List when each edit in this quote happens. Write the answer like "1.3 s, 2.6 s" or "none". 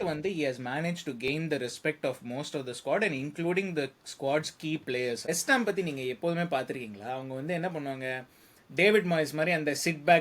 5.3 s